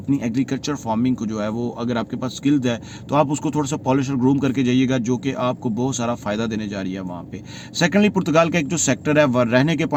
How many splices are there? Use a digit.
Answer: 0